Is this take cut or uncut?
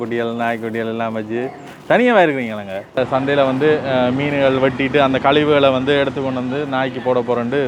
cut